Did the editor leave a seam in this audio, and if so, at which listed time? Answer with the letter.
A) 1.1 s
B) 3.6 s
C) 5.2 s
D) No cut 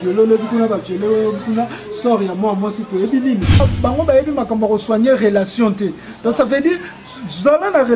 B